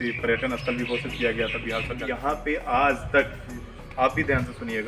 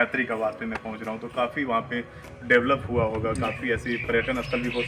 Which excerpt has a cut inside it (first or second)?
first